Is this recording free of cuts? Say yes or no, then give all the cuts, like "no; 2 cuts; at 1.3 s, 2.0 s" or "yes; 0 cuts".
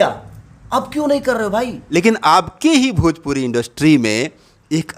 no; 1 cut; at 1.9 s